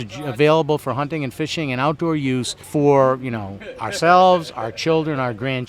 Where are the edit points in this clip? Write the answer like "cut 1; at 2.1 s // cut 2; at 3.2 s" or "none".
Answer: cut 1; at 2.6 s